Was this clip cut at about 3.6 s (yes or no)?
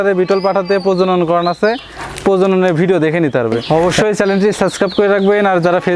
yes